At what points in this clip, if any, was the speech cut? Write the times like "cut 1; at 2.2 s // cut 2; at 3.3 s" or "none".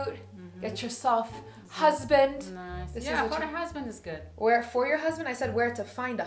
none